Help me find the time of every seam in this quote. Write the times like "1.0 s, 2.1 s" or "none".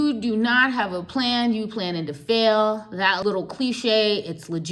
3.2 s